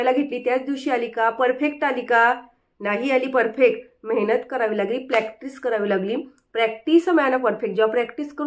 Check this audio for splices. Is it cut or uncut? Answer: uncut